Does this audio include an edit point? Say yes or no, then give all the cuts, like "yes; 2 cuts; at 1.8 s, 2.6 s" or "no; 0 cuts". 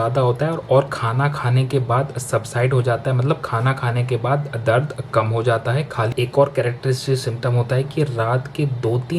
yes; 1 cut; at 6.1 s